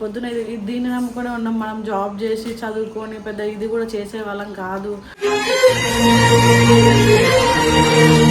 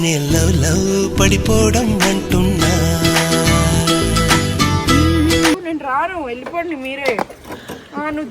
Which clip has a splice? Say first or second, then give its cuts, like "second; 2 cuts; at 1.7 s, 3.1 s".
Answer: second; 1 cut; at 5.6 s